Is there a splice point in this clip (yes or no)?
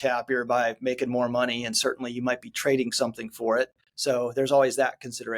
yes